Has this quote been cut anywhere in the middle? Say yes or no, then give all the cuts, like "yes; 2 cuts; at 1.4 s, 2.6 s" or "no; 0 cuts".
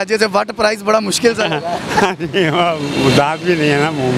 no; 0 cuts